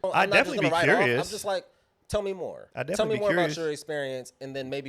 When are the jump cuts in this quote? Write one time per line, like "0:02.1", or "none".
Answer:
0:02.6